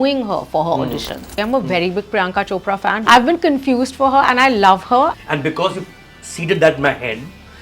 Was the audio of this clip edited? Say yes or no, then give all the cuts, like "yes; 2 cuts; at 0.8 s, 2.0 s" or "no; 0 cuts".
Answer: yes; 3 cuts; at 1.3 s, 3.0 s, 5.2 s